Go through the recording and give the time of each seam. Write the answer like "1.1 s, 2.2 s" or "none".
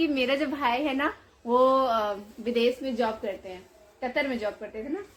none